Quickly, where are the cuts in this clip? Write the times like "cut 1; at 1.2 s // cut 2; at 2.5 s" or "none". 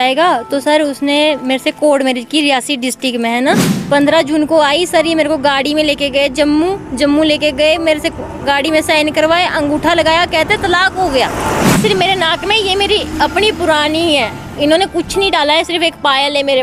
cut 1; at 3.7 s // cut 2; at 11.8 s